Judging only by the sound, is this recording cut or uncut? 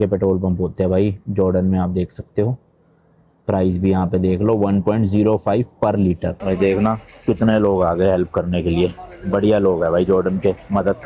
cut